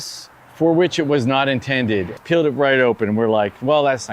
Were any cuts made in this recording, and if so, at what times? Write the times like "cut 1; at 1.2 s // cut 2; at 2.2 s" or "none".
cut 1; at 2.2 s